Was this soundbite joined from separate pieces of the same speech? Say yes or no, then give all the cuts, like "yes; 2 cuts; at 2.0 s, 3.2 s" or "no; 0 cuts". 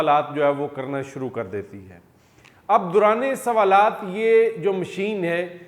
no; 0 cuts